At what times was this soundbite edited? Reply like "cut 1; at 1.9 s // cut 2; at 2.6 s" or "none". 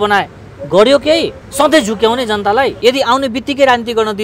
cut 1; at 1.4 s // cut 2; at 2.8 s